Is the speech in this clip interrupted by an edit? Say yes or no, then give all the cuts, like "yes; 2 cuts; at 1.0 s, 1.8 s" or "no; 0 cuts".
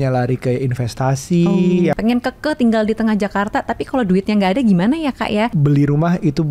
yes; 2 cuts; at 2.0 s, 5.5 s